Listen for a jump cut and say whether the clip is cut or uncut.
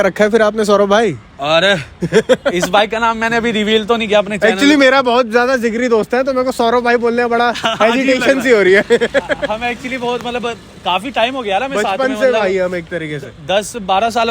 uncut